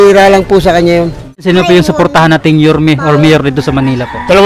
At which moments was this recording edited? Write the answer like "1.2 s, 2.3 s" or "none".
1.4 s